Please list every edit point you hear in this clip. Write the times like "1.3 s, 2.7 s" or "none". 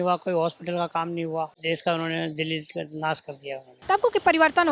1.6 s, 3.8 s